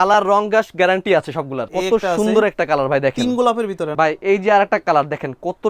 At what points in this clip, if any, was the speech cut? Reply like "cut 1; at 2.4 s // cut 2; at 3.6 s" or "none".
cut 1; at 1.7 s // cut 2; at 3.9 s